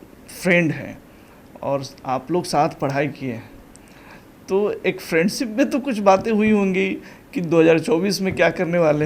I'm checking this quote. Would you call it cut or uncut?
uncut